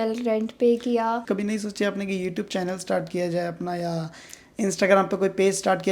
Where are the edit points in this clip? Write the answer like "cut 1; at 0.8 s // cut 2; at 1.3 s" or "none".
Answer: cut 1; at 1.2 s